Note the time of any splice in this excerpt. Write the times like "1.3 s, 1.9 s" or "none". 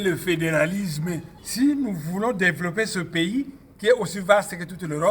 1.4 s